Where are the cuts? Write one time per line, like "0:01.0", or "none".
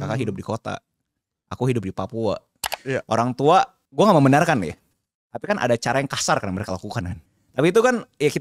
0:02.7
0:03.8
0:07.1